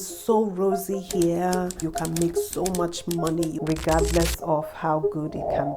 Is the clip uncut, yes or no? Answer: no